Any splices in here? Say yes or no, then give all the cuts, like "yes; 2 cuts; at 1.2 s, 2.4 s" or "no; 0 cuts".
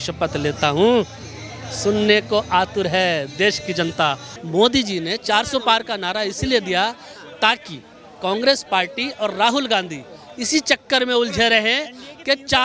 yes; 1 cut; at 4.3 s